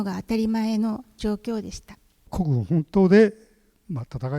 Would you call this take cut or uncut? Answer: cut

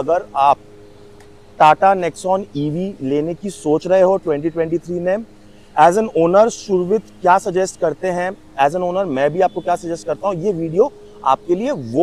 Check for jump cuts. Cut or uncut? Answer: uncut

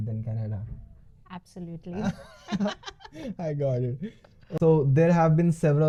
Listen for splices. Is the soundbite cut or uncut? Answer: uncut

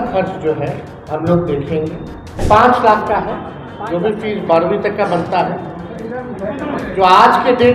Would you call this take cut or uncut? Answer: cut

